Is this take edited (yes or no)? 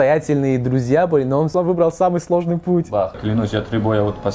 yes